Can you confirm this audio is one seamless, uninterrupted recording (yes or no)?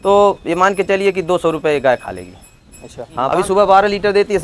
no